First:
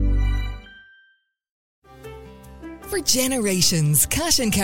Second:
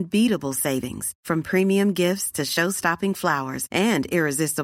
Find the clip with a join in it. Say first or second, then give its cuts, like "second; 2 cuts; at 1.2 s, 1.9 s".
first; 1 cut; at 1.6 s